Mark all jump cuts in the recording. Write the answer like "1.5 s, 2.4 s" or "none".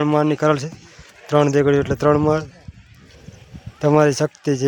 none